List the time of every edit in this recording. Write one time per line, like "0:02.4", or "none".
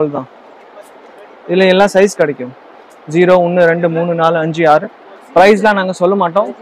none